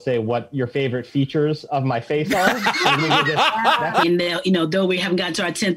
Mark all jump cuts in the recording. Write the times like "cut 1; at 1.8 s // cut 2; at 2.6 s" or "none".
cut 1; at 4.0 s